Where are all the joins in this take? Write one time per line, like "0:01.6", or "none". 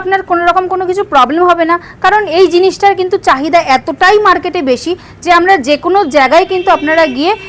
none